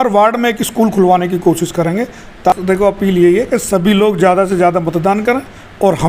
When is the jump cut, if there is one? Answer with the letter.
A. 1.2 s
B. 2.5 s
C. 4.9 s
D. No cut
B